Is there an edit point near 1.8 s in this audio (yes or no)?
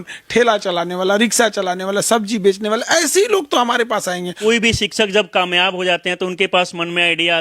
no